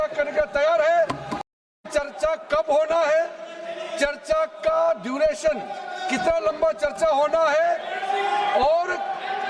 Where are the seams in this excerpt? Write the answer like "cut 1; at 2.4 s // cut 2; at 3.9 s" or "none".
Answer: cut 1; at 1.4 s